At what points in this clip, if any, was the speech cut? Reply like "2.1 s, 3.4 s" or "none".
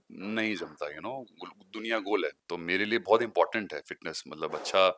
2.4 s